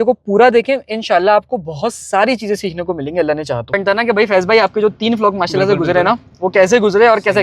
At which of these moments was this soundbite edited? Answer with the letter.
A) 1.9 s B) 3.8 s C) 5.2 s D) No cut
B